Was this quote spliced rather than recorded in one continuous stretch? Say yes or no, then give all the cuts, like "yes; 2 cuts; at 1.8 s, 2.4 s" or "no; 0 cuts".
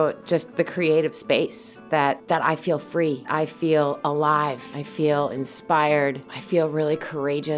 yes; 4 cuts; at 2.2 s, 3.3 s, 4.8 s, 6.3 s